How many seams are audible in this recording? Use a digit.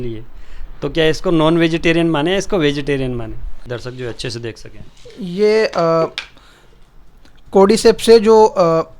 1